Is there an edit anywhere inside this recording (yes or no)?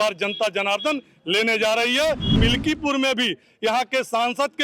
yes